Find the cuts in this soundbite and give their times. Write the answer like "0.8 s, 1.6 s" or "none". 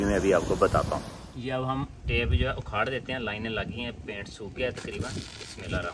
1.4 s